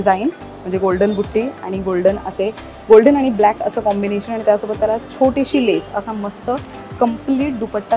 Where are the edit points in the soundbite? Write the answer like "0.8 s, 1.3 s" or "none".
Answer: none